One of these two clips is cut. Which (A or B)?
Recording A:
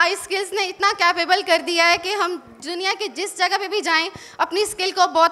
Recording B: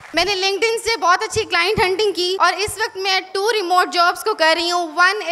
B